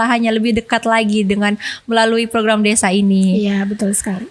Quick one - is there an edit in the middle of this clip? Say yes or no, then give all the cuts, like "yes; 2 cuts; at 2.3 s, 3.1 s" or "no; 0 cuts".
no; 0 cuts